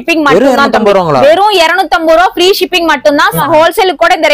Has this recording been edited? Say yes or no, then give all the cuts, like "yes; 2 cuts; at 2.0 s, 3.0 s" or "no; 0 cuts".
yes; 1 cut; at 3.3 s